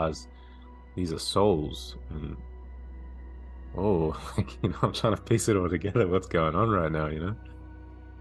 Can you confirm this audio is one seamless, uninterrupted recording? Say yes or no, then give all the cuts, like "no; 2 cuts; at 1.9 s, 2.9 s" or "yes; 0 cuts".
yes; 0 cuts